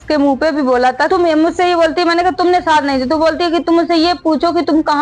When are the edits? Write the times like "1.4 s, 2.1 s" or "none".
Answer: 1.1 s